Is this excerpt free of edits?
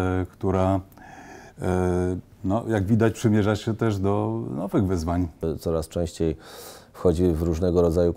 no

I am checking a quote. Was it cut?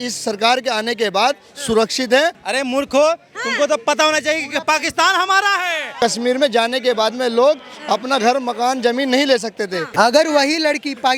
yes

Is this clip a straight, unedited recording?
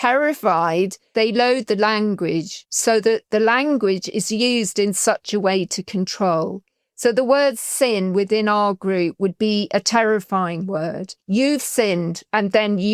no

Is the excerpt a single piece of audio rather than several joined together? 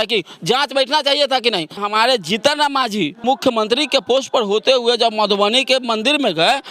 no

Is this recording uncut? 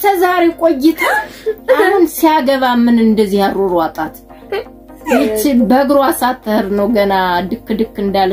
no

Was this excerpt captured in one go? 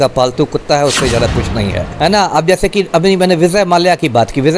no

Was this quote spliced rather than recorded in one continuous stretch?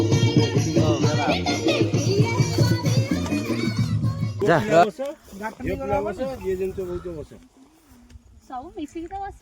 yes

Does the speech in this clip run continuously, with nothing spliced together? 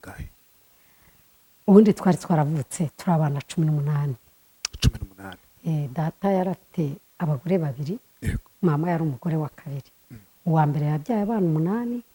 yes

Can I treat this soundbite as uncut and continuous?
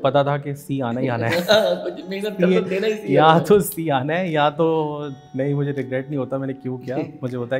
no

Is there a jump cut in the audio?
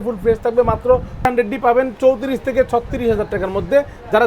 yes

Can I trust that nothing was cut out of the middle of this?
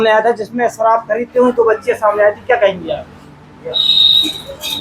yes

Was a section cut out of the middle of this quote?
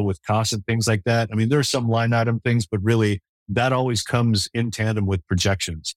yes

